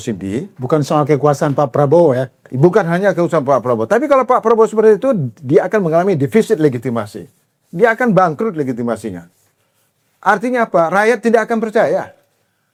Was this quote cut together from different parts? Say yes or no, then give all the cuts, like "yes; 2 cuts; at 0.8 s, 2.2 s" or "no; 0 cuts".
no; 0 cuts